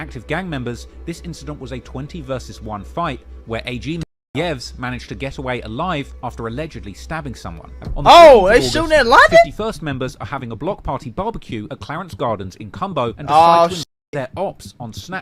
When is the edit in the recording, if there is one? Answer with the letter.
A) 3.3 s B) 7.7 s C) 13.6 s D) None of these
B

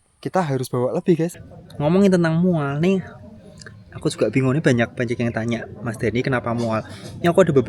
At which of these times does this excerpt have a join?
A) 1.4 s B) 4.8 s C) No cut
A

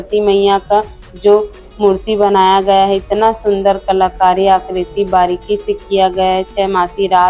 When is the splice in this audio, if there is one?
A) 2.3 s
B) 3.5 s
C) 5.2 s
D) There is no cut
D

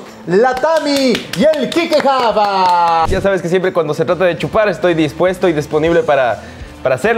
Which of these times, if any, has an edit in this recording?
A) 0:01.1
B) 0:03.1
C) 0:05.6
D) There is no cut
B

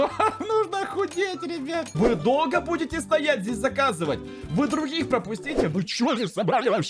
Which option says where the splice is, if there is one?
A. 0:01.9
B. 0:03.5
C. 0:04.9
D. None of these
A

